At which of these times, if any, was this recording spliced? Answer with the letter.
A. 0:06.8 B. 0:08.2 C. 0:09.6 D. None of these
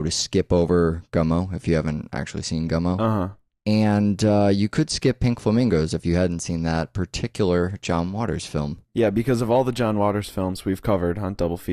B